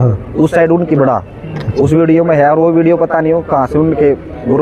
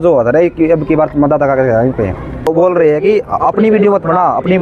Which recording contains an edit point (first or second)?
second